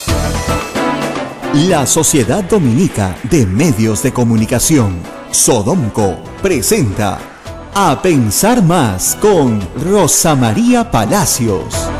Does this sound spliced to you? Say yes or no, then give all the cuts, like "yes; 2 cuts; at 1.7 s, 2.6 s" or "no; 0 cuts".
yes; 1 cut; at 1.3 s